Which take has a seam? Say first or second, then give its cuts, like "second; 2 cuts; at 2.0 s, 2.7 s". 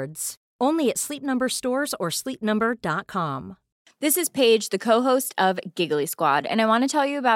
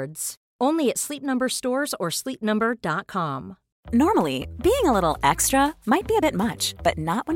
first; 1 cut; at 3.7 s